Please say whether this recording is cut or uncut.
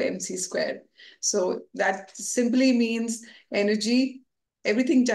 uncut